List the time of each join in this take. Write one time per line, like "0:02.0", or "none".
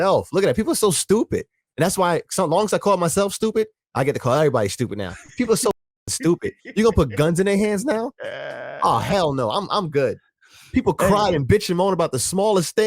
none